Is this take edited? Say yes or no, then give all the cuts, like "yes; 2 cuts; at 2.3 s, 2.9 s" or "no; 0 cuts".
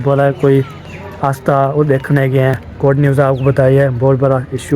yes; 1 cut; at 2.6 s